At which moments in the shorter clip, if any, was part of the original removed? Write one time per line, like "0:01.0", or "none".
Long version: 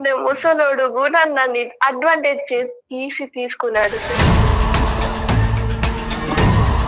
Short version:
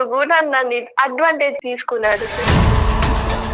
0:01.6